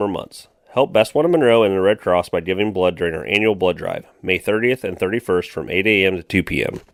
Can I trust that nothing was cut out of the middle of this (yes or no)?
yes